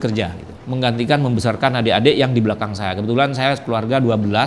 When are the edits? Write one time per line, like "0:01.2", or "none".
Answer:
none